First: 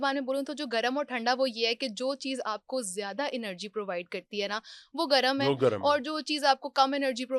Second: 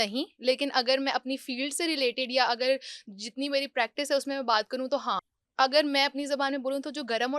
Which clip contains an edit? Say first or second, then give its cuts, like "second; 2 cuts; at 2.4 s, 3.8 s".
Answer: second; 1 cut; at 5.3 s